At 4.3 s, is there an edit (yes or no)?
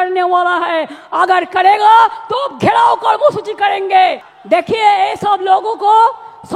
yes